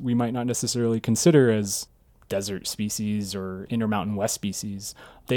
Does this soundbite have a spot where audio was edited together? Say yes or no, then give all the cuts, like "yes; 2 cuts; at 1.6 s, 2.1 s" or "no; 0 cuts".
yes; 1 cut; at 3.6 s